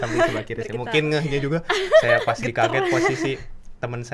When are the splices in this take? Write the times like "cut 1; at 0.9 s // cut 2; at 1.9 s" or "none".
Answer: none